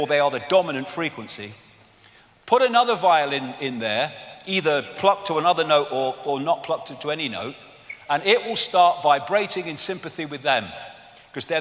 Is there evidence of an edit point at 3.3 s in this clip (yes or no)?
no